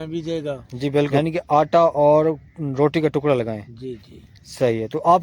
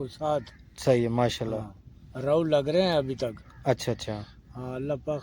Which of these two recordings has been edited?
first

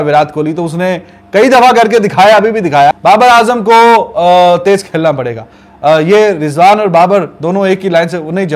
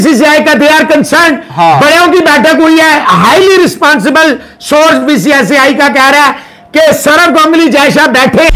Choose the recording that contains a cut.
first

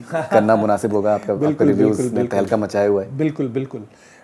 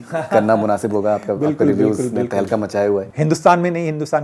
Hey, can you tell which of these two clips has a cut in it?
second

